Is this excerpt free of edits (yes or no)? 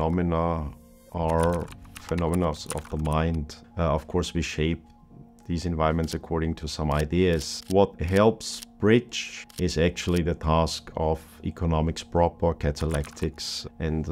no